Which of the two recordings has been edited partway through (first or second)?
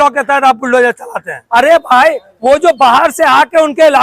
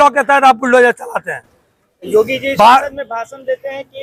first